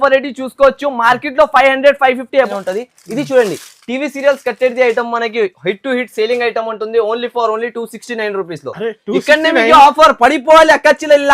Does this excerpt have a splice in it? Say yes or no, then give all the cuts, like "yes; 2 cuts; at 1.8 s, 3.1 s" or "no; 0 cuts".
yes; 1 cut; at 2.5 s